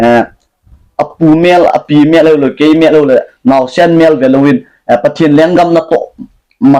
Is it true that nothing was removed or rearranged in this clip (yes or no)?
yes